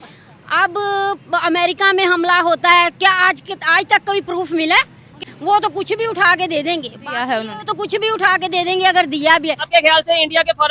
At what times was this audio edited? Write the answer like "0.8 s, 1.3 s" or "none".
5.3 s, 9.7 s